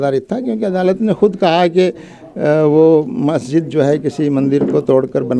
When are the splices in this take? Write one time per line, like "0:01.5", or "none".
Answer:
none